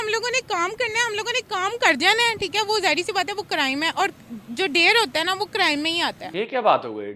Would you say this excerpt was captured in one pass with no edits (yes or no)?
no